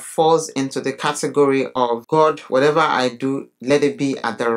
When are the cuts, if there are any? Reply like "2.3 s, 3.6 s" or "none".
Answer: 2.0 s